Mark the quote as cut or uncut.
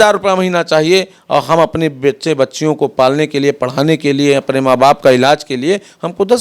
uncut